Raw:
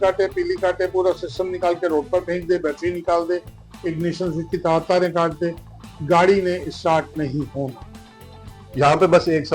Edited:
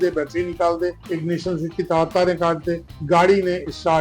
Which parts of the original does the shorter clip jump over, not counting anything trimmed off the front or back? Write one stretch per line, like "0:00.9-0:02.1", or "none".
0:03.5-0:03.7
0:05.6-0:05.9